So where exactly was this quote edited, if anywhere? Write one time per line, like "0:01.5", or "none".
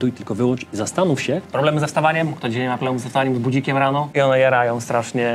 0:01.5
0:04.1